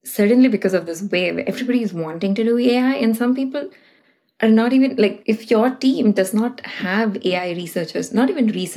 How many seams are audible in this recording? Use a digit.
1